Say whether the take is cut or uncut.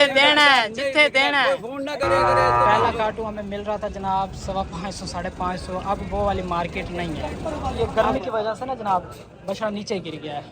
cut